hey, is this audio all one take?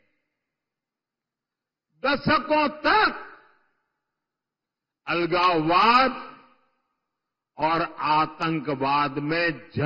yes; 0 cuts

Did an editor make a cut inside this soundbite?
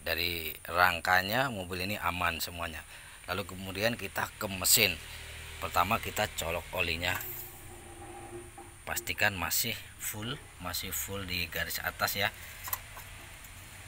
no; 0 cuts

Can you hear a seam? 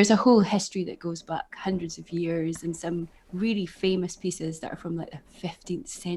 no; 0 cuts

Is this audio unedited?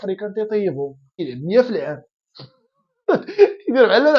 no; 1 cut; at 1.1 s

